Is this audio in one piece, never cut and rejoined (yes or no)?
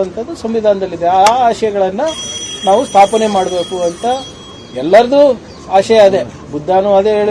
yes